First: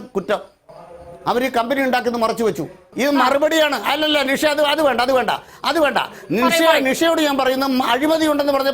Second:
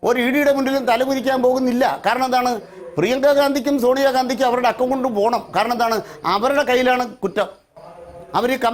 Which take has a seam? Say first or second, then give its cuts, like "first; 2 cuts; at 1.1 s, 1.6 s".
first; 1 cut; at 2.8 s